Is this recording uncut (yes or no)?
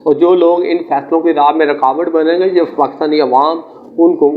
yes